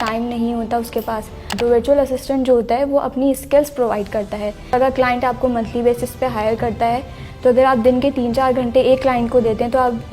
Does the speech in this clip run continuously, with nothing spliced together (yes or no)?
no